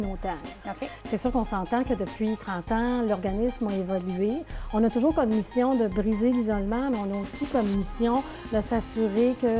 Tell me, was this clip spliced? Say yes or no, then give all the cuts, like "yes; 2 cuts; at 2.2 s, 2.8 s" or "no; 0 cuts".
no; 0 cuts